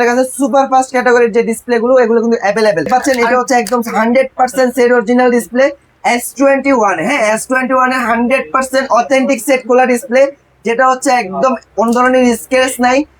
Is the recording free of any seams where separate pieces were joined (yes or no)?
no